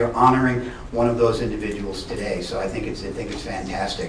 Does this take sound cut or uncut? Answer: cut